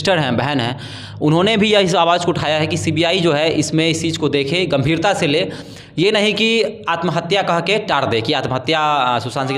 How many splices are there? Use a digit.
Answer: 0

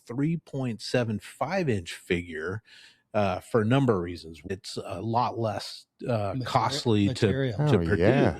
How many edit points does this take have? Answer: 1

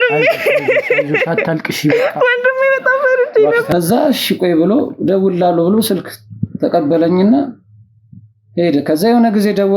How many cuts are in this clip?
1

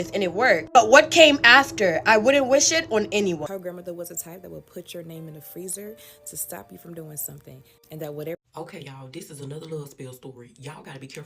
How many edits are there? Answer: 2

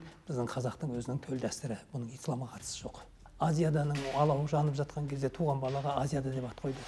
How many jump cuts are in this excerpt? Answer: 1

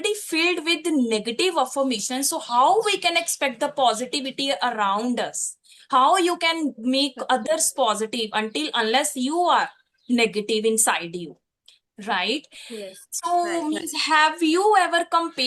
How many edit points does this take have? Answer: 0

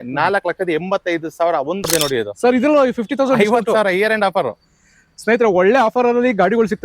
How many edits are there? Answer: 1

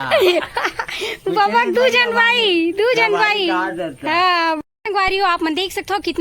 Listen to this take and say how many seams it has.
1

